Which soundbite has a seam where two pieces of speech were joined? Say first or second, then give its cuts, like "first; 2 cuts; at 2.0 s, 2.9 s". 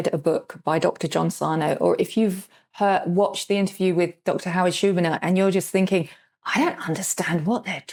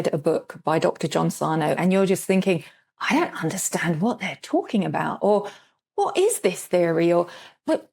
second; 1 cut; at 1.8 s